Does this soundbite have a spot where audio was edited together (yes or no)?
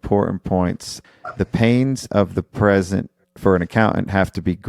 yes